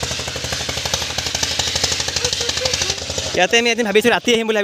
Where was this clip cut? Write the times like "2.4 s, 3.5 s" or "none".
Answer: 3.0 s

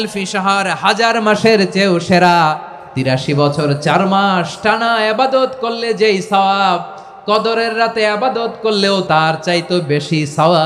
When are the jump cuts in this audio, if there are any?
3.1 s, 9.0 s

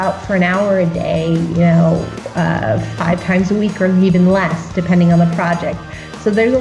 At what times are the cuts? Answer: none

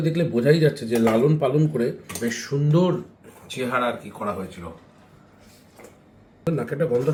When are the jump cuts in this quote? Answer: none

